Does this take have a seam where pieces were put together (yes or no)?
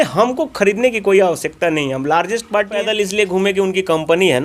yes